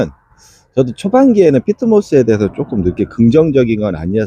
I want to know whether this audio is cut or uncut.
uncut